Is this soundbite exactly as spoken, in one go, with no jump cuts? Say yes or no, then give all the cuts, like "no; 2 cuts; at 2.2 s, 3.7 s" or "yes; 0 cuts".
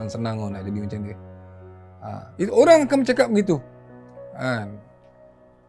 yes; 0 cuts